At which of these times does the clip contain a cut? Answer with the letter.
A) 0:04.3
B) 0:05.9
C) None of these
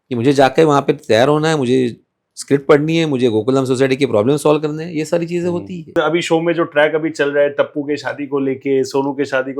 B